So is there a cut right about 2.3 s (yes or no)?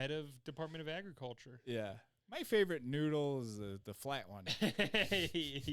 no